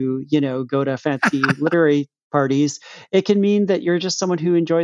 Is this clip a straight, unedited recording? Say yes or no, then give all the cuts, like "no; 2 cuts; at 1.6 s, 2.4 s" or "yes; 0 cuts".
yes; 0 cuts